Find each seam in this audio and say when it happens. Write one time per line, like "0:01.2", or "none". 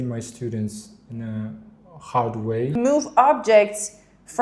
0:02.8